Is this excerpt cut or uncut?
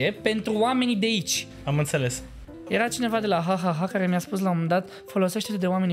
cut